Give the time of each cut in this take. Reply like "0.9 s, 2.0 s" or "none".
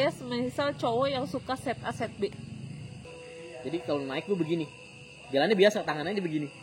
3.0 s